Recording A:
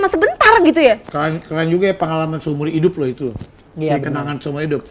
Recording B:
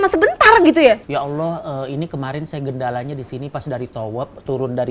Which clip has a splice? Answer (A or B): B